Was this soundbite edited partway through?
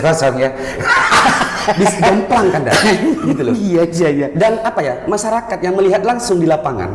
no; 0 cuts

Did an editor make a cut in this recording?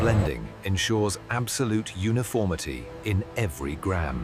no; 0 cuts

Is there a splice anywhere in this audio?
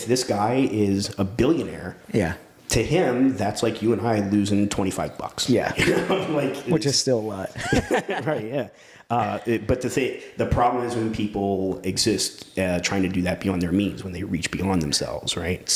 no; 0 cuts

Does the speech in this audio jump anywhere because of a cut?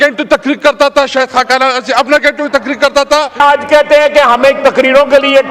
yes; 1 cut; at 3.4 s

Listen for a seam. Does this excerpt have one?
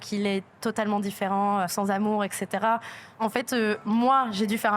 yes; 2 cuts; at 1.7 s, 3.0 s

